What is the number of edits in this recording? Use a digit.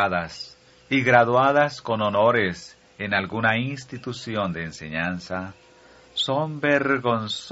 1